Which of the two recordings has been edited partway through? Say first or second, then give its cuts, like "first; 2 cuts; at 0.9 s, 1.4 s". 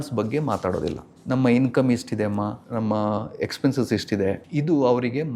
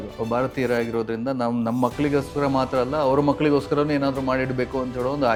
first; 3 cuts; at 1.1 s, 2.6 s, 4.4 s